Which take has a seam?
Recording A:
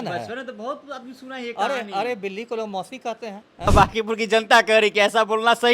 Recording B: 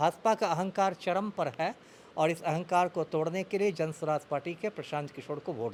A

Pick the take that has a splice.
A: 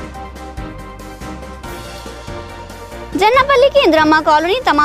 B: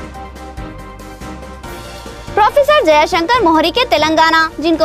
B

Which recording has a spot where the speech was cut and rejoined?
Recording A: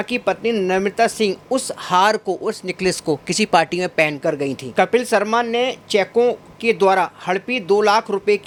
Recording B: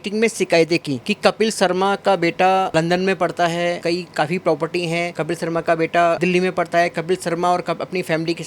B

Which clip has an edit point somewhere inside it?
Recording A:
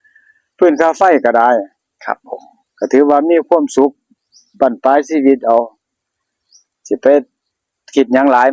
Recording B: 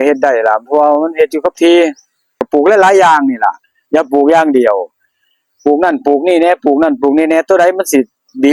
B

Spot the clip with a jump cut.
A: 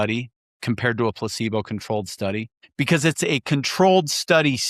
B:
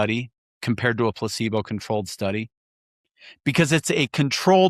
A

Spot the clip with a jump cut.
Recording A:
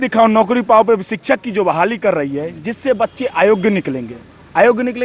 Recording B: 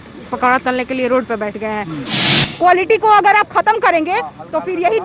B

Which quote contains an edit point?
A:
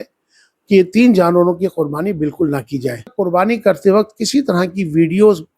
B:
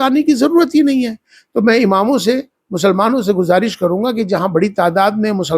A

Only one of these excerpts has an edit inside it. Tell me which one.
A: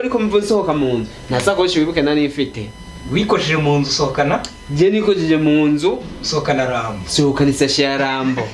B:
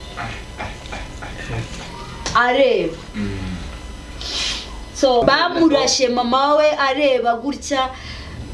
B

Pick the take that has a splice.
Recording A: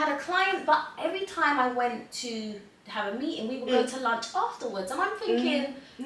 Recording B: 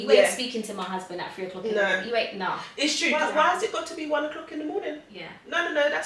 B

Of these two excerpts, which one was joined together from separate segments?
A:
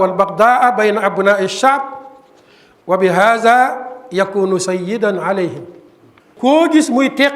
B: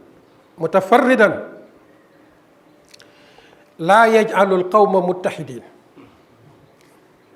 A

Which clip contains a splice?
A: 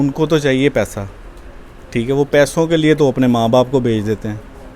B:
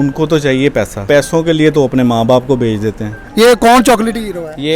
B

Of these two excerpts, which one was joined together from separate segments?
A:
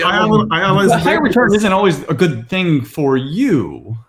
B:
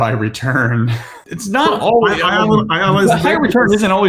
B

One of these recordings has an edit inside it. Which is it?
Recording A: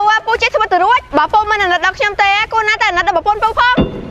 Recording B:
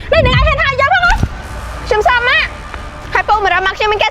B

